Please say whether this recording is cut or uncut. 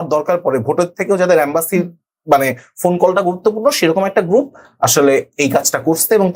uncut